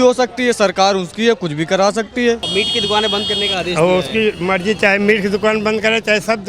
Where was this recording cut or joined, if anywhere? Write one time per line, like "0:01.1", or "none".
0:02.4

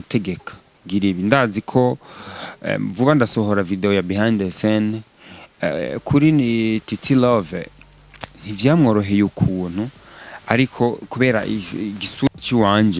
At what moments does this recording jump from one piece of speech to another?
none

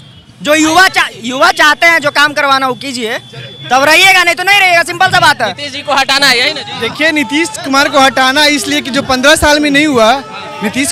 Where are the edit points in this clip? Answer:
none

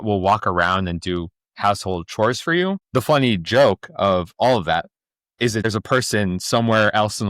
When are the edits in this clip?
0:02.8
0:05.6

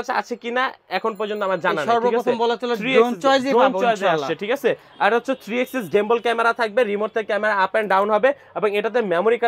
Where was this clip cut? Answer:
none

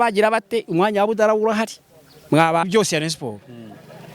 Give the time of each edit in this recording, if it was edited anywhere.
0:02.7

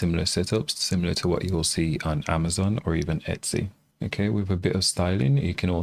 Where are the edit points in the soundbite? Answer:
none

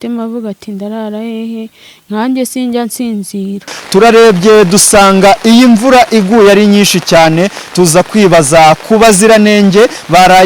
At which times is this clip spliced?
0:03.8

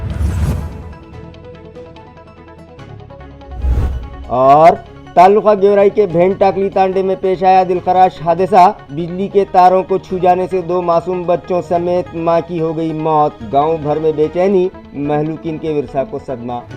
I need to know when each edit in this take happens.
0:03.8

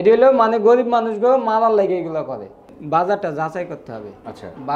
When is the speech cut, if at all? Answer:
0:02.7

